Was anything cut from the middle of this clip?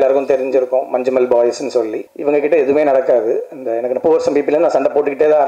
yes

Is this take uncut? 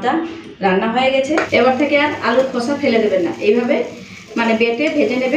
no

